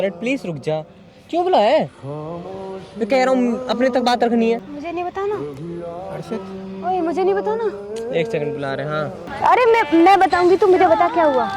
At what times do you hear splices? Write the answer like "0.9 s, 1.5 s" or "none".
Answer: 9.2 s